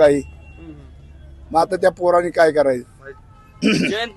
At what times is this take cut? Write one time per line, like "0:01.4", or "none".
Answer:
none